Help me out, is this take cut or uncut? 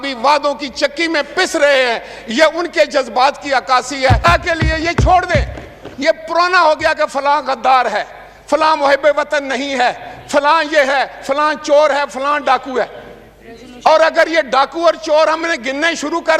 cut